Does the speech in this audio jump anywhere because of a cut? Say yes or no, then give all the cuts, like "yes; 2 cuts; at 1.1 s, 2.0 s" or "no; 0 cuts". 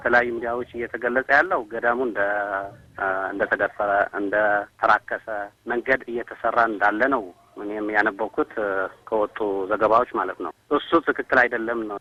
no; 0 cuts